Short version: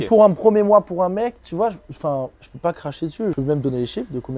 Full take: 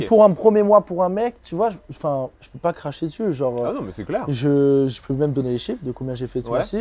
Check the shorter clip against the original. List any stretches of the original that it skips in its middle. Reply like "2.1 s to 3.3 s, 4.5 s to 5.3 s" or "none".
3.4 s to 5.1 s